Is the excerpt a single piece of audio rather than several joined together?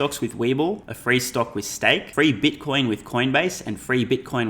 no; 2 cuts; at 0.9 s, 2.1 s

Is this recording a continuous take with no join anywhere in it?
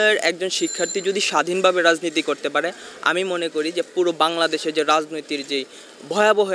yes; 0 cuts

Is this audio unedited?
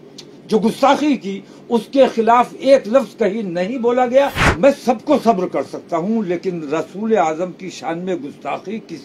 no; 1 cut; at 4.4 s

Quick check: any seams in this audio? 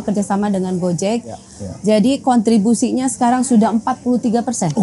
yes; 1 cut; at 1.5 s

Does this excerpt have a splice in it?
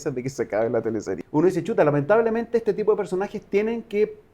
yes; 1 cut; at 1.2 s

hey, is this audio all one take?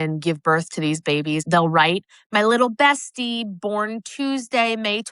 no; 1 cut; at 1.5 s

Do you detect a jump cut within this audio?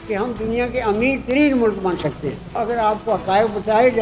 yes; 1 cut; at 2.5 s

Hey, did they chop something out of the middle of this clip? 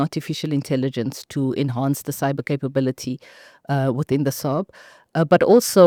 no; 0 cuts

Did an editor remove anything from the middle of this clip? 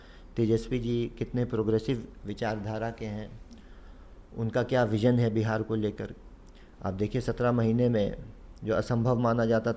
no; 0 cuts

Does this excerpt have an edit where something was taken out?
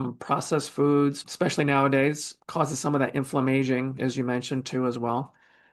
yes; 1 cut; at 1.2 s

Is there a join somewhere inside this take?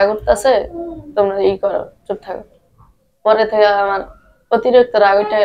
no; 0 cuts

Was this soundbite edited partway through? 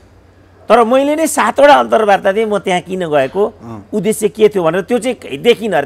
no; 0 cuts

